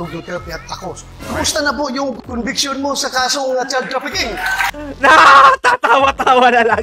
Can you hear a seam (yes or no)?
yes